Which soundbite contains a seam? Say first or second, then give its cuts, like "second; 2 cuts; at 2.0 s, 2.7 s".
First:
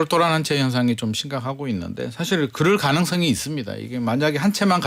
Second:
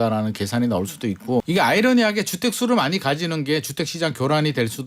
second; 1 cut; at 1.5 s